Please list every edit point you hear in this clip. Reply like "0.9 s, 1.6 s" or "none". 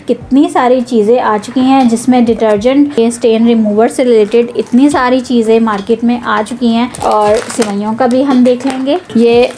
2.9 s, 6.9 s